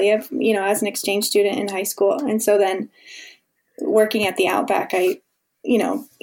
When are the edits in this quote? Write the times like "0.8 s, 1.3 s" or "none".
none